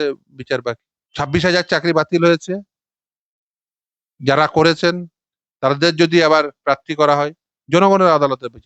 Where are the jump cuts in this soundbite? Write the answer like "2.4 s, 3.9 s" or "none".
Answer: 1.0 s